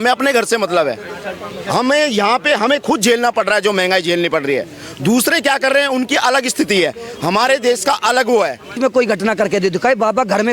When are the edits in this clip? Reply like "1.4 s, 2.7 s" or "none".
8.8 s

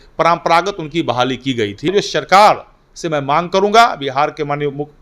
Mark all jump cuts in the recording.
1.9 s

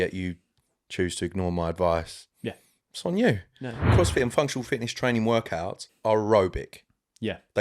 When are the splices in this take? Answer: 3.9 s, 5.8 s

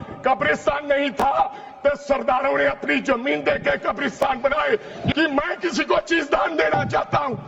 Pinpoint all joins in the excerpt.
5.1 s

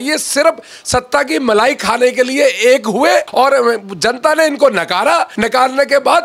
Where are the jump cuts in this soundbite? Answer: 3.3 s, 5.3 s

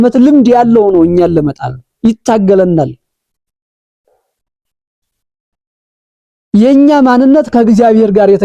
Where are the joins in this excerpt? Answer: none

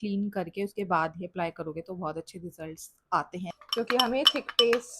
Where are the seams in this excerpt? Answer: 3.5 s

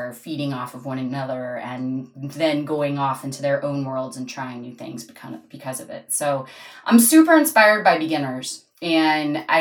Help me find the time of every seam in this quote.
none

